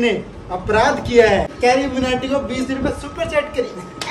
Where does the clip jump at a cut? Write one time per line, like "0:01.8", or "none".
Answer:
0:01.5